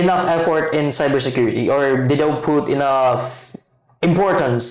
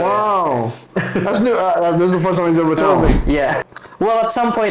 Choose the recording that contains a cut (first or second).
second